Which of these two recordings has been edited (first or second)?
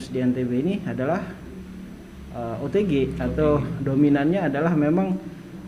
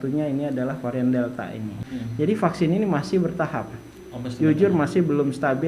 second